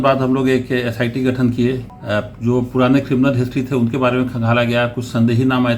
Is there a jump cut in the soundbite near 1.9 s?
yes; 1 cut; at 1.9 s

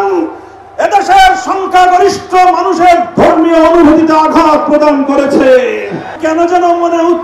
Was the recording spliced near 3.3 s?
no; 1 cut; at 6.1 s

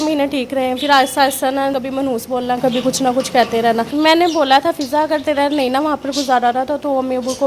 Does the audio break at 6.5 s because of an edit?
no; 2 cuts; at 1.7 s, 3.9 s

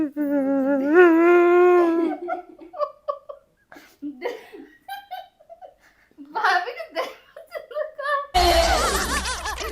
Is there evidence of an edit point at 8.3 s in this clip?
yes; 1 cut; at 8.3 s

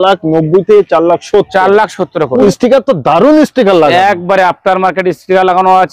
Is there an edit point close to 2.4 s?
yes; 1 cut; at 2.4 s

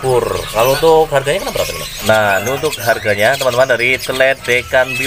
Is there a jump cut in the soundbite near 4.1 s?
no; 1 cut; at 1.9 s

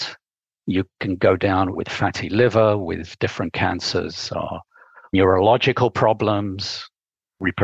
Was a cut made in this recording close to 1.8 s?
yes; 3 cuts; at 1.8 s, 3.1 s, 5.1 s

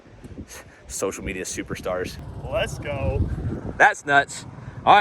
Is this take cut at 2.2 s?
yes; 1 cut; at 2.2 s

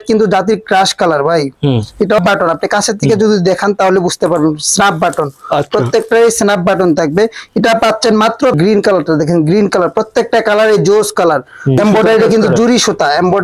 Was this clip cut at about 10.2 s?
no; 3 cuts; at 2.2 s, 8.6 s, 11.8 s

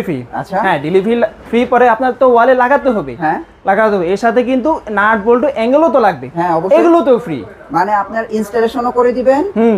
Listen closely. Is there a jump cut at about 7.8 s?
no; 0 cuts

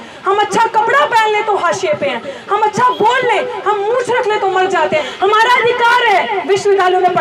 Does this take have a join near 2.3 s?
no; 1 cut; at 5.1 s

